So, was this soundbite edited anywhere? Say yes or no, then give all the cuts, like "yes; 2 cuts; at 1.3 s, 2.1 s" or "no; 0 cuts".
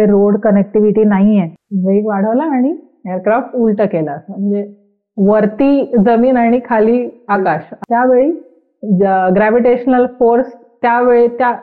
yes; 2 cuts; at 1.6 s, 7.8 s